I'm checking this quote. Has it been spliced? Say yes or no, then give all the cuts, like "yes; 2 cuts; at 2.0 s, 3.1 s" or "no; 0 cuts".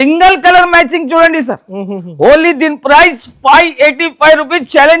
no; 0 cuts